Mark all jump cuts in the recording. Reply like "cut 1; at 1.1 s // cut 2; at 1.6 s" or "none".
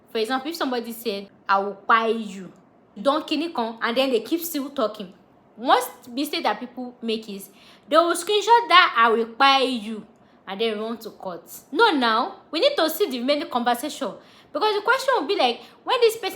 cut 1; at 1.3 s // cut 2; at 2.9 s